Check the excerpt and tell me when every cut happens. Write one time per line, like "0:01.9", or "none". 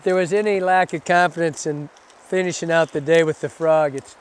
none